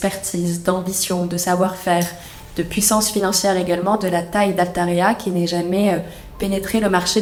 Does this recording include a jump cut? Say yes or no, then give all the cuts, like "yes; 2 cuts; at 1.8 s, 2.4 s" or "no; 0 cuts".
no; 0 cuts